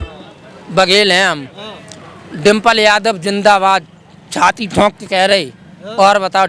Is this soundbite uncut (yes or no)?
yes